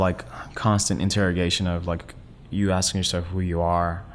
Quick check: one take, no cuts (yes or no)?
yes